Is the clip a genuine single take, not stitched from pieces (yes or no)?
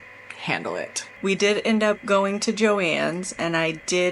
no